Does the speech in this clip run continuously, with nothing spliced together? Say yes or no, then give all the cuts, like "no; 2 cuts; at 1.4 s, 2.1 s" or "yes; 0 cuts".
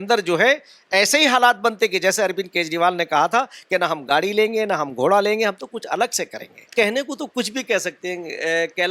no; 1 cut; at 6.7 s